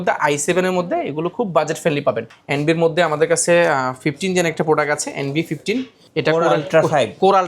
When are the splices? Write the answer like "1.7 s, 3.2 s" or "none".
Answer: 2.3 s, 6.0 s